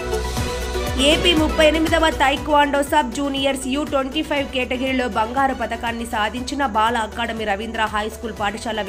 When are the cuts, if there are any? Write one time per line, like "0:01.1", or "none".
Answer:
none